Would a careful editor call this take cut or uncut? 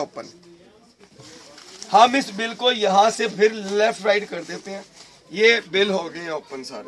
uncut